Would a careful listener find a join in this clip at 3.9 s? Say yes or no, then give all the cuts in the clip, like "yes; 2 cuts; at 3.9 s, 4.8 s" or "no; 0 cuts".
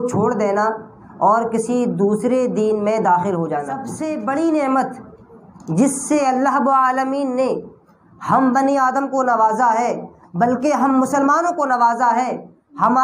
yes; 1 cut; at 3.9 s